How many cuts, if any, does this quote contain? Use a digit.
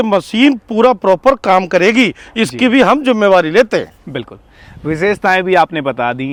0